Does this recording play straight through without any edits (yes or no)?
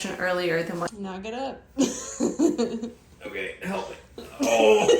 no